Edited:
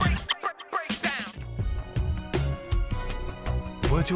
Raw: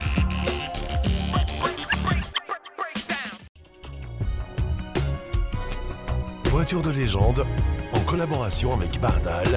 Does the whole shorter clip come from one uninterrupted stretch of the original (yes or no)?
no